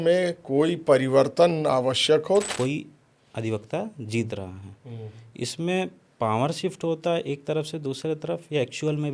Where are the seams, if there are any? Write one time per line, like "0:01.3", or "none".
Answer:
0:02.5